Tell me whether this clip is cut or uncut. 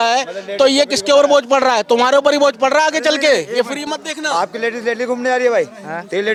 uncut